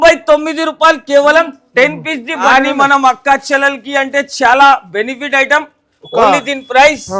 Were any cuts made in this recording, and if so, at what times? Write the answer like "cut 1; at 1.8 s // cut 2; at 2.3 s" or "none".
cut 1; at 2.4 s